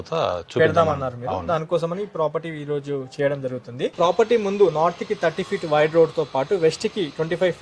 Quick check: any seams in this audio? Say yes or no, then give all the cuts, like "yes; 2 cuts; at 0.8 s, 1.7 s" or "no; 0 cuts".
yes; 1 cut; at 3.9 s